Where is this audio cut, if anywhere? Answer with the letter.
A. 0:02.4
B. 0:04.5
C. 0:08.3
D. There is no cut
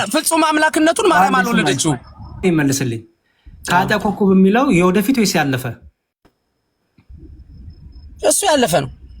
A